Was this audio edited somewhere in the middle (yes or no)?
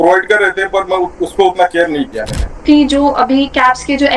yes